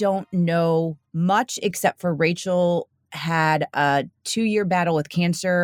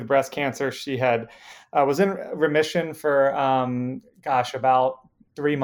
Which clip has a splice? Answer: first; 1 cut; at 1.0 s

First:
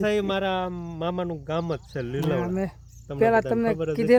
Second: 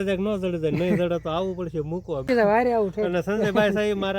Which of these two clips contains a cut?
second; 1 cut; at 2.2 s

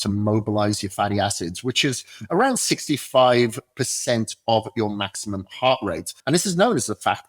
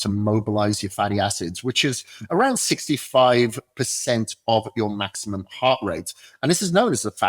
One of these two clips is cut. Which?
first; 1 cut; at 6.1 s

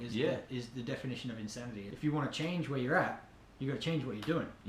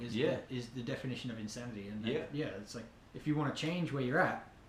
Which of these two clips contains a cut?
first; 1 cut; at 1.8 s

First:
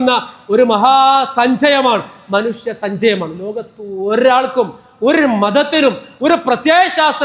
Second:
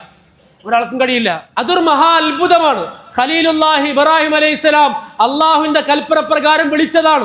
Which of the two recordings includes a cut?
second; 1 cut; at 1.5 s

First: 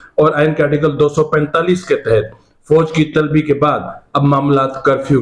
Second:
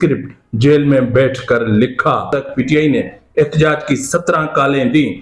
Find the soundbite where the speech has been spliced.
second; 1 cut; at 2.4 s

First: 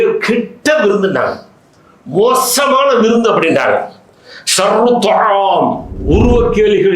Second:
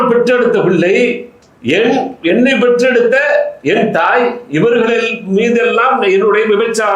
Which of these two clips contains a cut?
first; 1 cut; at 5.9 s

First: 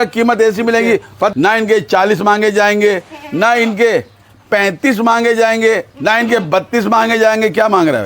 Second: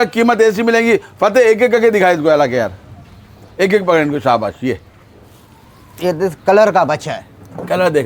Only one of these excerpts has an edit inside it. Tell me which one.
first; 1 cut; at 1.3 s

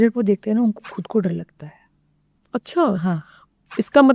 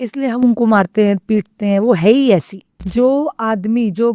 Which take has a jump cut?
second; 1 cut; at 2.8 s

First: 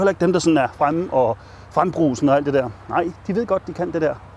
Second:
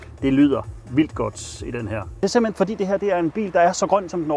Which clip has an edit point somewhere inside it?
second; 1 cut; at 2.2 s

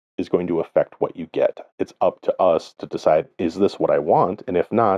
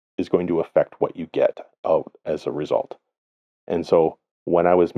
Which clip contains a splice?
first; 1 cut; at 1.6 s

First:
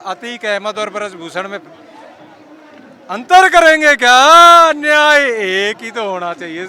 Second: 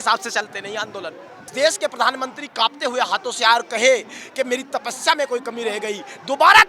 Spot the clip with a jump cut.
second; 1 cut; at 1.5 s

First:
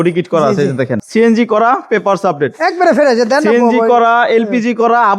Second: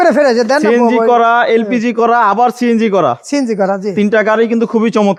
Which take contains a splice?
first; 1 cut; at 1.0 s

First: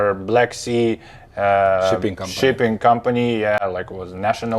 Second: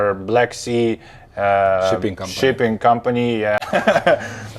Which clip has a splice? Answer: second; 1 cut; at 3.6 s

